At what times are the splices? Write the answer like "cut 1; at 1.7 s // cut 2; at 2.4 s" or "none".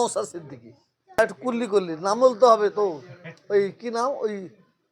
cut 1; at 1.2 s